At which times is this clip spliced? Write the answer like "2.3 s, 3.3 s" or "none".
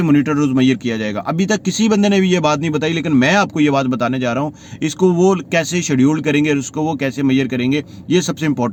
none